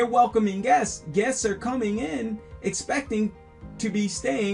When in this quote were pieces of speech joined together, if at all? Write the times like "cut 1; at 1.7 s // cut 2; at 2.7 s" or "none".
none